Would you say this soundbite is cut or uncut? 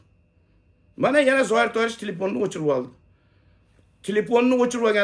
uncut